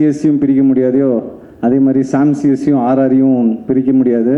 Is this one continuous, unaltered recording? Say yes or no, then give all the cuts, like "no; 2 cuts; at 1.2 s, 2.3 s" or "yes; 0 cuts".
yes; 0 cuts